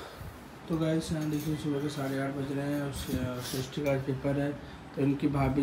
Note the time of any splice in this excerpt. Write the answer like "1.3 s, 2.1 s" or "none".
none